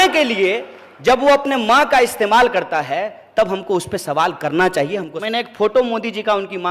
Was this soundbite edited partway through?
yes; 1 cut; at 5.1 s

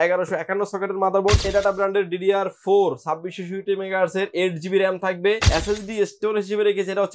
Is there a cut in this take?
yes; 2 cuts; at 1.4 s, 5.4 s

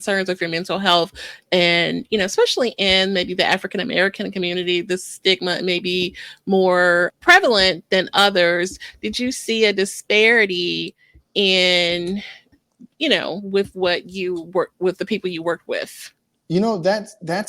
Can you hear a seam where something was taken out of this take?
yes; 2 cuts; at 7.1 s, 12.4 s

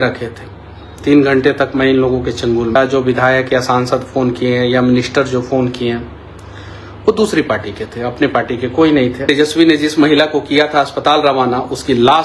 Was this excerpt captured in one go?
no; 2 cuts; at 2.8 s, 9.2 s

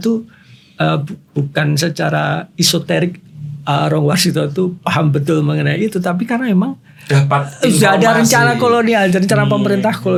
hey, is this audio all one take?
yes; 0 cuts

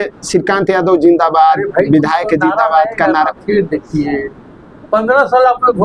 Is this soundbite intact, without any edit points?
yes; 0 cuts

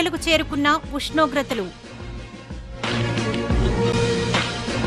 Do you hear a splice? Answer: no; 0 cuts

